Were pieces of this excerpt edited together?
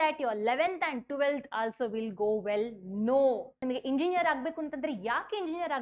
yes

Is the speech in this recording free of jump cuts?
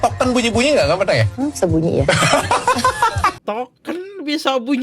no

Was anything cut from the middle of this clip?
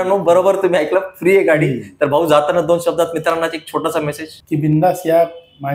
no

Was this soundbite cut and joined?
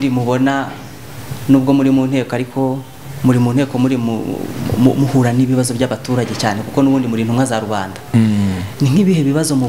no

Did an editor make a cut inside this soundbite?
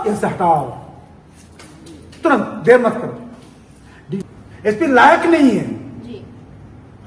yes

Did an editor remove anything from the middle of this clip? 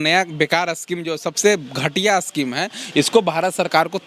no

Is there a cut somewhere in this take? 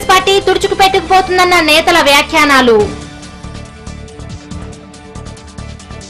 no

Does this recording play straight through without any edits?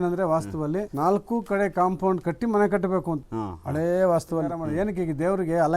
no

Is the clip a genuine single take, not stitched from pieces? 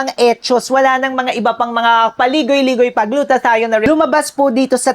no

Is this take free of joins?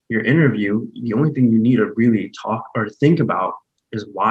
yes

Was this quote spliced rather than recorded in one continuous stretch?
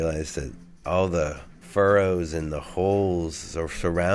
no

